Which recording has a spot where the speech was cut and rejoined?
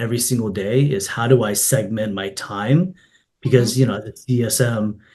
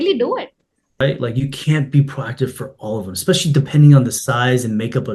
second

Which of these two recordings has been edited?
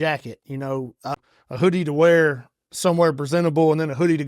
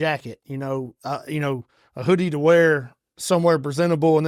first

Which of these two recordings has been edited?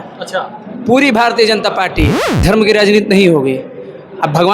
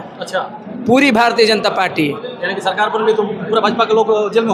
first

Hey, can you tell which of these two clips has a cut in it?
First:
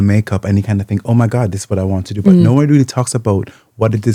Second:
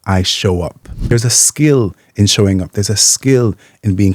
second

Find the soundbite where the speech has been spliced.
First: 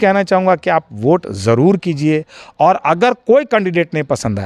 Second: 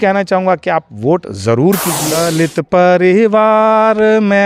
second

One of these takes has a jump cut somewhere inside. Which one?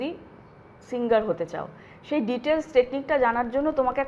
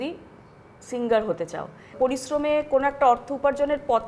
second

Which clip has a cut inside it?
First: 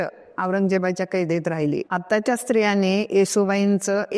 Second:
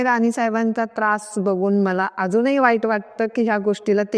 first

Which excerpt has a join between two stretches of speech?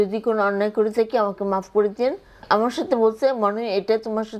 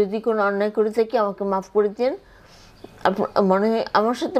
first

